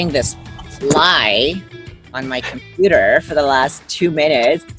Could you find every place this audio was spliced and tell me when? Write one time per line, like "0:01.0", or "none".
none